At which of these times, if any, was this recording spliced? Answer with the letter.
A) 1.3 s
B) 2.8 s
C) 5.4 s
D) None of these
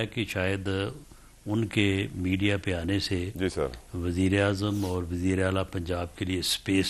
D